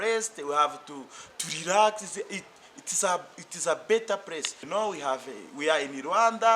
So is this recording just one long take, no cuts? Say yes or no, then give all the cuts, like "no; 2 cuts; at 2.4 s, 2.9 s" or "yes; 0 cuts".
no; 1 cut; at 4.6 s